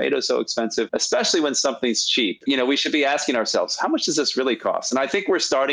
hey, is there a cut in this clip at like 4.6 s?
no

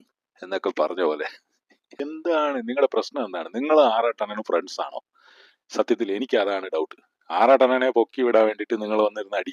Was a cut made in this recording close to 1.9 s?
yes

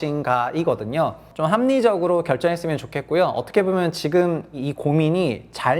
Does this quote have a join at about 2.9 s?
no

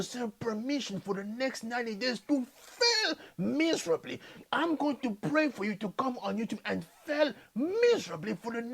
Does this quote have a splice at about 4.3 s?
yes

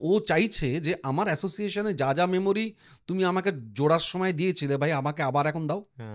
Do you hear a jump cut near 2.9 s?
no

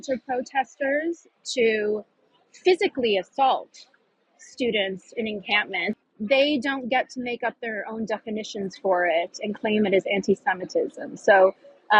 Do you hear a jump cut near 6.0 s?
yes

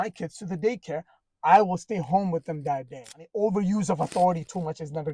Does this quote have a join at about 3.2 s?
yes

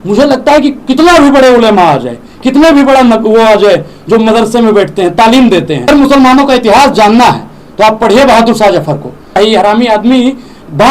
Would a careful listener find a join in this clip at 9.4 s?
yes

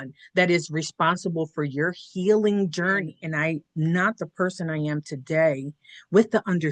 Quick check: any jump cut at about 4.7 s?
no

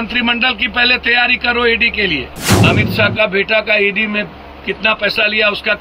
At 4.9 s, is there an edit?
no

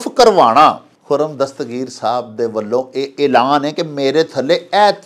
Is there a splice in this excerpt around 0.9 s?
yes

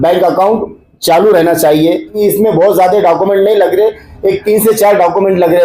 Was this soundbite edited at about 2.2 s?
yes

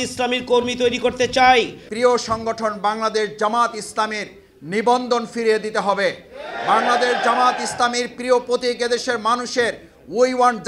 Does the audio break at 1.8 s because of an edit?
yes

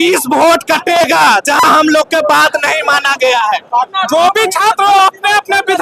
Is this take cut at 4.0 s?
yes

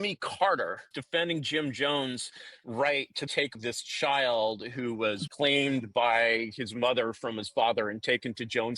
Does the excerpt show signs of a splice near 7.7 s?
no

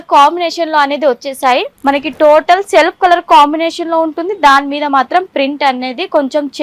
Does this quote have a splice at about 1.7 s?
yes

